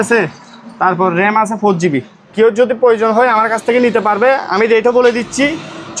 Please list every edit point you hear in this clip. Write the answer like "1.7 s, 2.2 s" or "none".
2.2 s